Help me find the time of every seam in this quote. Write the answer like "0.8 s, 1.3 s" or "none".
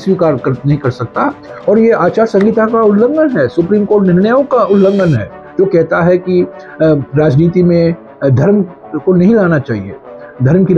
none